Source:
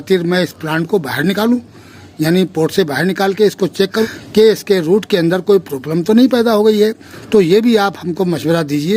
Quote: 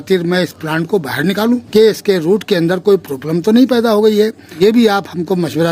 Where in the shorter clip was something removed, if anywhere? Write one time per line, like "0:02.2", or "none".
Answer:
0:01.6
0:04.6